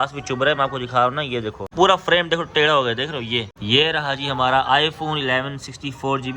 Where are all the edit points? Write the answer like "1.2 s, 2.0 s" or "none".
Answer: 1.7 s, 3.5 s